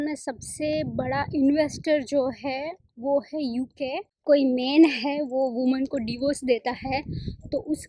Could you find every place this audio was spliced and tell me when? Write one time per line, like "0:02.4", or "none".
0:04.1